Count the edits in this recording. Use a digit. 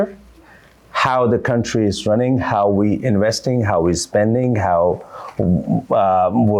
0